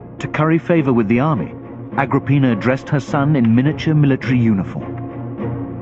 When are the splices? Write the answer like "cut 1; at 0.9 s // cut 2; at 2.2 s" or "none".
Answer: cut 1; at 3.3 s